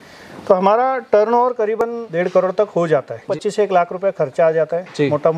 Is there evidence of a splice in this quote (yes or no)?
yes